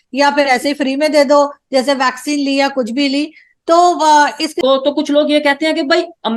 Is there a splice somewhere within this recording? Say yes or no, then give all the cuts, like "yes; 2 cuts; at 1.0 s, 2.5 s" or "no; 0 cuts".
yes; 1 cut; at 4.5 s